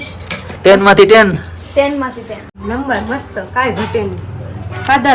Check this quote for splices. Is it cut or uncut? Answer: cut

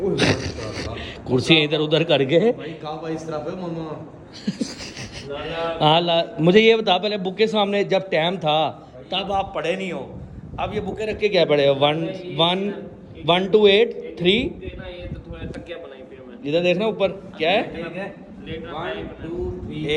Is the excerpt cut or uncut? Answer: uncut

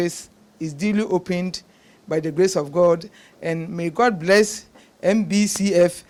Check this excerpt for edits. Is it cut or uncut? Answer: uncut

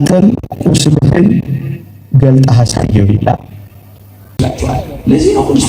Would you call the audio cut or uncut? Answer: cut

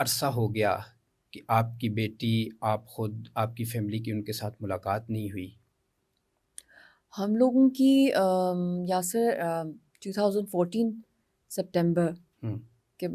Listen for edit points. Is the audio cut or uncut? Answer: uncut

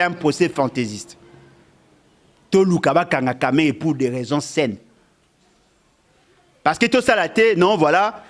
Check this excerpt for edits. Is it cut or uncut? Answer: uncut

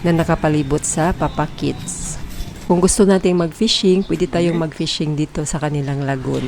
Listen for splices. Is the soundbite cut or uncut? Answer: cut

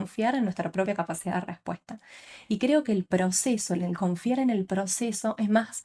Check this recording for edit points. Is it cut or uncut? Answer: uncut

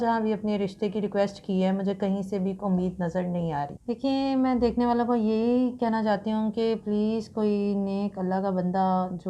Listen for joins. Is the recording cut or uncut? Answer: cut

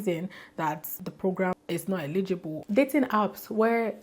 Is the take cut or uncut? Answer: cut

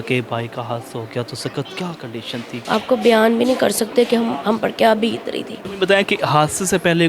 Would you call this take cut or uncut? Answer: cut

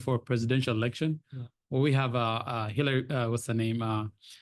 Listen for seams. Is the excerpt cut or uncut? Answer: uncut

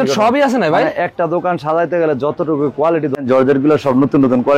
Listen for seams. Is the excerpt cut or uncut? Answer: cut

